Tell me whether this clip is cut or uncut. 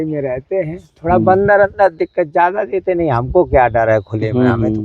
uncut